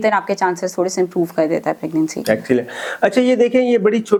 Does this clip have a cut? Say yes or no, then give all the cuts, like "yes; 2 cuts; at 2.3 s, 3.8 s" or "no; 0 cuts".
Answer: no; 0 cuts